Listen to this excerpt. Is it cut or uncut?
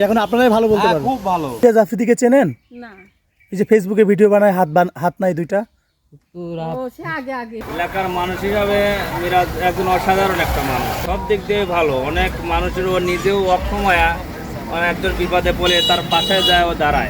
cut